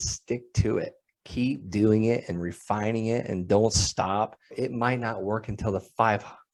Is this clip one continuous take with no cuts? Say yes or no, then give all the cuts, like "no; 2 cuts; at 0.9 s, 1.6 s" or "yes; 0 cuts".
yes; 0 cuts